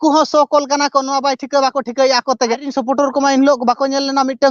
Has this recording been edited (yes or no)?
yes